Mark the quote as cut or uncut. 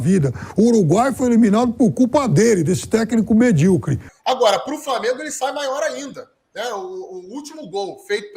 cut